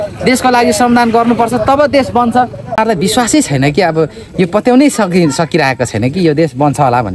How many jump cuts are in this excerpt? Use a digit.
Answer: 1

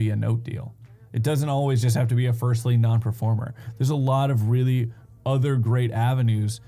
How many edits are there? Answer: 0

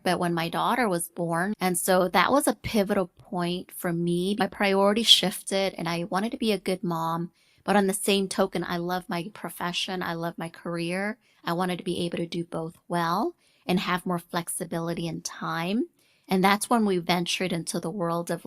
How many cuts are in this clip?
2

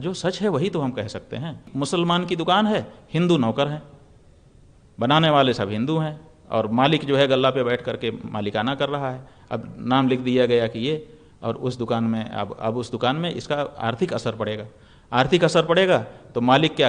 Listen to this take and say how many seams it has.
1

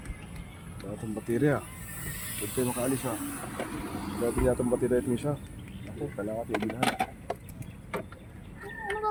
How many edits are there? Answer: 0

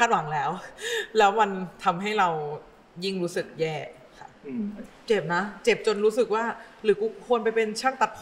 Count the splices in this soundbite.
1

